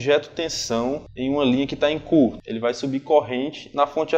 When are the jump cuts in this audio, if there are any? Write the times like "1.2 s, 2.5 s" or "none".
1.1 s, 2.5 s